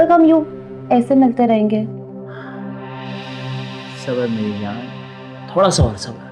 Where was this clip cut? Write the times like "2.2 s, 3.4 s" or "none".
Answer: none